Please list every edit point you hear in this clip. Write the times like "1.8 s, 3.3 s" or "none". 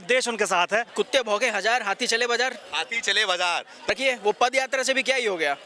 0.9 s, 3.9 s